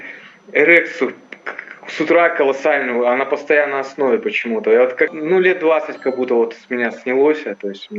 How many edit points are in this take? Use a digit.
1